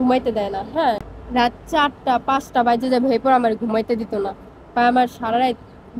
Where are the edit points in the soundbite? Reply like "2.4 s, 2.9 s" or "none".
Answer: 1.1 s